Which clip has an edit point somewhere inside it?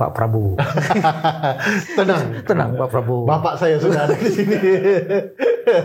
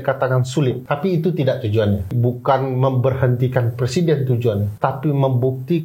second; 3 cuts; at 0.8 s, 2.1 s, 4.7 s

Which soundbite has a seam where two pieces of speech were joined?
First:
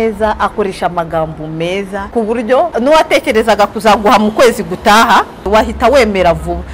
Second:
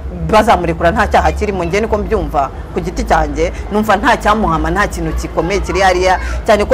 first; 3 cuts; at 2.0 s, 2.7 s, 5.4 s

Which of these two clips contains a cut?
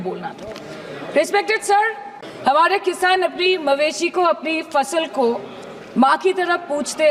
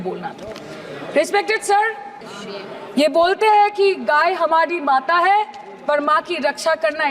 second; 1 cut; at 2.3 s

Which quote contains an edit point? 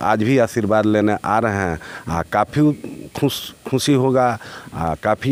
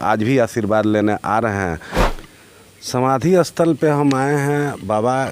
second; 1 cut; at 1.9 s

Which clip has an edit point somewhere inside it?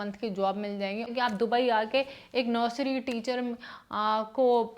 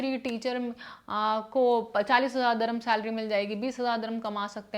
first; 1 cut; at 1.1 s

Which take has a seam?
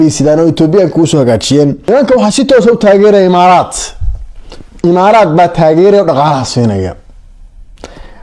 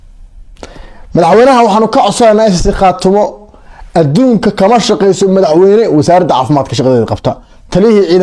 first; 1 cut; at 1.8 s

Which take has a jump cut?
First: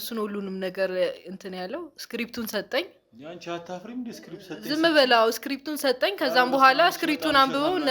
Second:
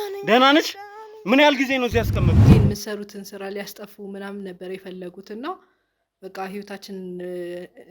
second; 1 cut; at 2.4 s

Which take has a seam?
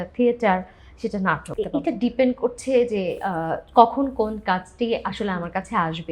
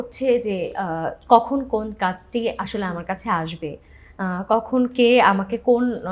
first; 1 cut; at 1.5 s

